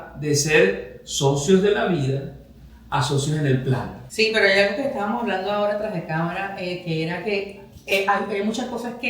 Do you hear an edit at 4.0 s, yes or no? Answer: yes